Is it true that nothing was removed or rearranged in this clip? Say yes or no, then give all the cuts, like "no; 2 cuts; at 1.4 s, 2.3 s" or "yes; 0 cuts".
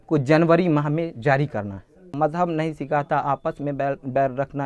no; 1 cut; at 2.1 s